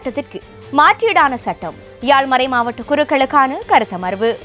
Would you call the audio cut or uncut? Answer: uncut